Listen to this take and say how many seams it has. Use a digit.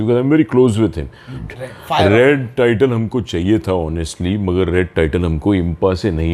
1